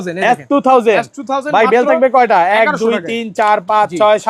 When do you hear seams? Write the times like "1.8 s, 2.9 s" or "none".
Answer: none